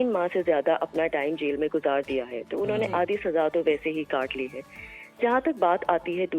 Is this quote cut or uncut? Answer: uncut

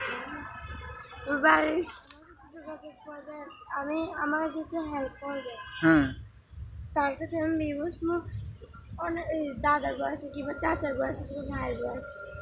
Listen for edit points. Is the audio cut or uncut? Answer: cut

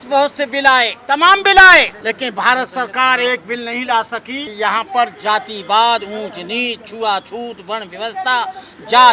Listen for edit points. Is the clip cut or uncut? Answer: cut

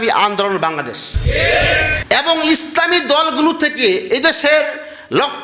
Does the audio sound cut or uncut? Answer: uncut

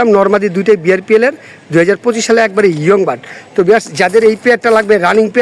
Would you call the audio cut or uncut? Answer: uncut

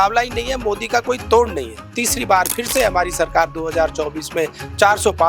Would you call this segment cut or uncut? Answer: cut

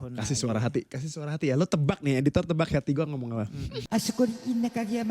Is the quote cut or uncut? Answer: cut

